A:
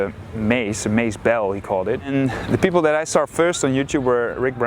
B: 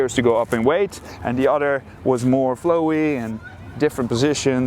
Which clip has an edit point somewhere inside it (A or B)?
A